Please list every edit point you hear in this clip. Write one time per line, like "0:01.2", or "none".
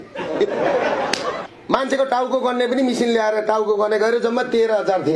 0:01.5